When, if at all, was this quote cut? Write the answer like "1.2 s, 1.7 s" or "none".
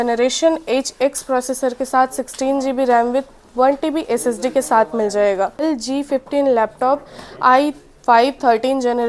5.6 s